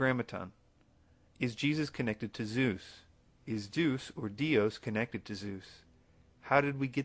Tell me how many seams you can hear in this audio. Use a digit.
1